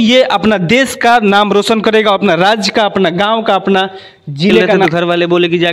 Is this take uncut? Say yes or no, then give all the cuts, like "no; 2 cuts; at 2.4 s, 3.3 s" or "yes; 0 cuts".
no; 1 cut; at 4.7 s